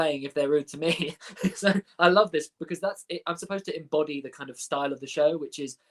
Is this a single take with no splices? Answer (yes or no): yes